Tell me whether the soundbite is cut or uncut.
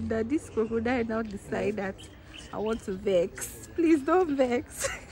uncut